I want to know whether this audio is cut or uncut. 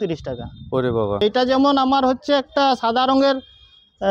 cut